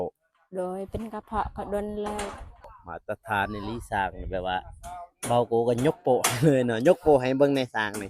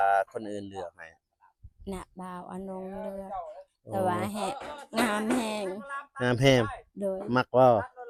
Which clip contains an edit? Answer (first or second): first